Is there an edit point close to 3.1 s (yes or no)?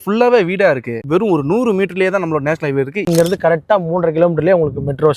yes